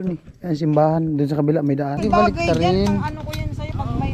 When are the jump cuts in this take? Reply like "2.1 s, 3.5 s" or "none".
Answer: 2.0 s